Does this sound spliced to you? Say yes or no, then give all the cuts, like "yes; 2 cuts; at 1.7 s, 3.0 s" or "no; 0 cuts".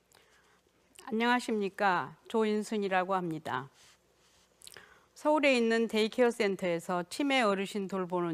no; 0 cuts